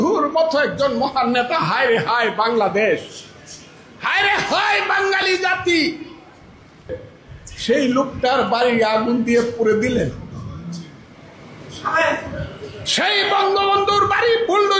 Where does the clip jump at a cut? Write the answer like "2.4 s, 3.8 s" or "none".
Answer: none